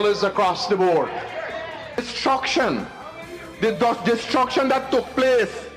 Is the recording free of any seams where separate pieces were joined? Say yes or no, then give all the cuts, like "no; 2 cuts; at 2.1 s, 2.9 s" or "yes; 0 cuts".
no; 1 cut; at 2.1 s